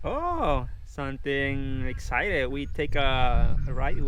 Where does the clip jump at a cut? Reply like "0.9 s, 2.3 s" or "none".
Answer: none